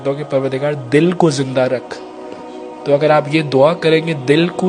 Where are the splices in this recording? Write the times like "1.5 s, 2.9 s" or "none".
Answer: none